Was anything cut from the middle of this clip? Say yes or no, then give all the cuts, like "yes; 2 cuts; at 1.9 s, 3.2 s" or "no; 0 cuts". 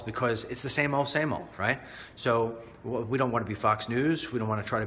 yes; 1 cut; at 3.5 s